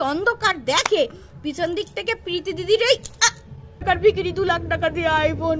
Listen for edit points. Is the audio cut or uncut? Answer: cut